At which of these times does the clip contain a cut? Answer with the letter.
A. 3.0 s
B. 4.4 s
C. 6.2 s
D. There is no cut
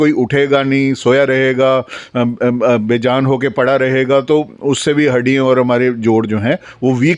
D